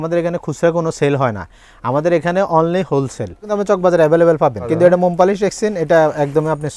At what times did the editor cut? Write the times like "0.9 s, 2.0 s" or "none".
3.5 s, 4.6 s

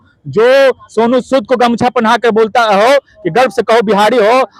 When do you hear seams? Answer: none

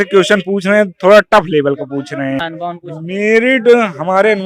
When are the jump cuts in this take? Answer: 2.4 s

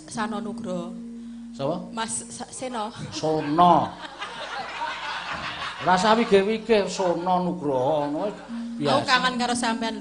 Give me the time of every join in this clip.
none

